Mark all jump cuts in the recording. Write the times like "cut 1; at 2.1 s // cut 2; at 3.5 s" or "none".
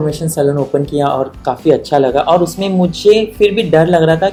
none